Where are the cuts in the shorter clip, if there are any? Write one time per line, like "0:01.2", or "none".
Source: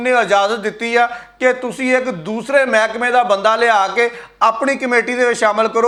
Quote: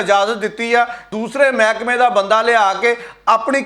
0:01.0

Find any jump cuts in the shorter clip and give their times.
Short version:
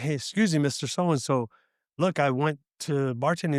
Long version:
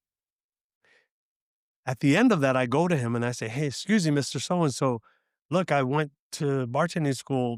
none

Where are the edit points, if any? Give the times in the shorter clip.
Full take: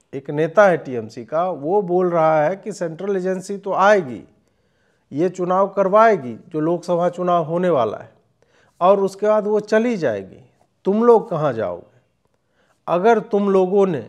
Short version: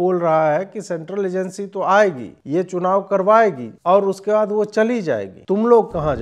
0:02.3
0:03.7
0:05.3

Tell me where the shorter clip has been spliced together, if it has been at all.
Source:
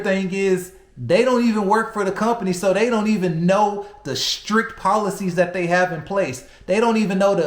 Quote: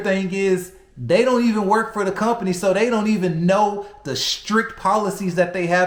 none

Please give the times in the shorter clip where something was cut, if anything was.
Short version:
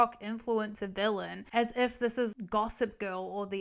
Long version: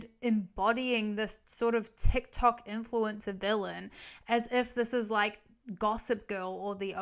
0:01.4
0:02.3

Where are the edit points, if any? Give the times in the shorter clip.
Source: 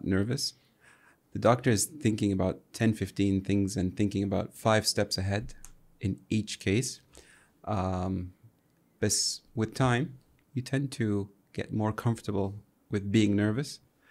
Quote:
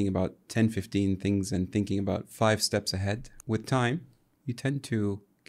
0:03.3

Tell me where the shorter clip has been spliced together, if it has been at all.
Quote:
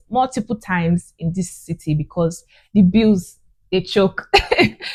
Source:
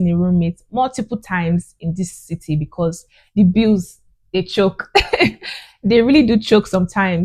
none

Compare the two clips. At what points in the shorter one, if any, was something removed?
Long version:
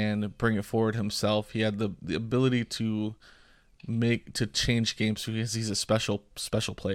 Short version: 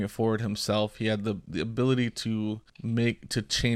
0:02.7

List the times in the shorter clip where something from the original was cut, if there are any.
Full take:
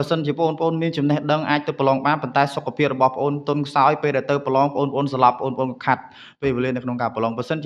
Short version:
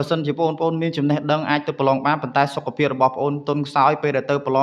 none

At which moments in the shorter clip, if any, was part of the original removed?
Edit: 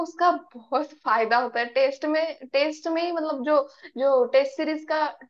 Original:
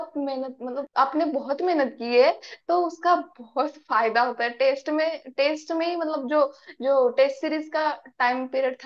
none

